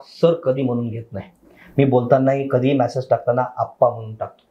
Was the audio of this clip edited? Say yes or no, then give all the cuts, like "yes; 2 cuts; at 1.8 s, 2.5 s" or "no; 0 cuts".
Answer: no; 0 cuts